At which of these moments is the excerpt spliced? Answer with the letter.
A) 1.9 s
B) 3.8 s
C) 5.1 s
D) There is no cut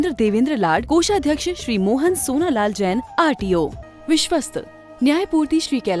B